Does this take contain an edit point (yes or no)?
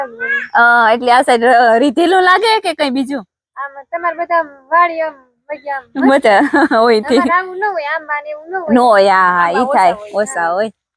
no